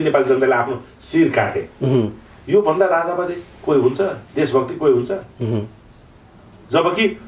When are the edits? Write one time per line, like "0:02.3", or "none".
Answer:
none